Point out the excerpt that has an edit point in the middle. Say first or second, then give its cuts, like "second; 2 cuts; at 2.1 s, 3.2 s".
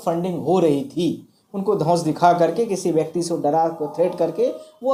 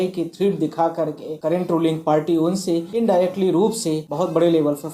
second; 3 cuts; at 1.3 s, 2.9 s, 4.1 s